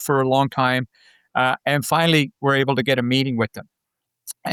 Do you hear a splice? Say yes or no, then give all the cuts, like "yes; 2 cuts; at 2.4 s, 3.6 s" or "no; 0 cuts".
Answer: no; 0 cuts